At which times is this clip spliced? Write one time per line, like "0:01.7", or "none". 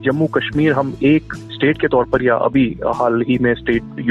0:01.3